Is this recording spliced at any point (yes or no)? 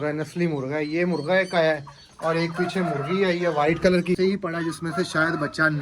yes